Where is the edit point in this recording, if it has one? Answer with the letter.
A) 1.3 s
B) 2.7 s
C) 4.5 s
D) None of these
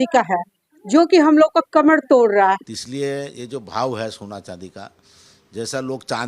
B